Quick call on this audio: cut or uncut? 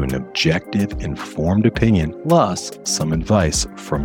cut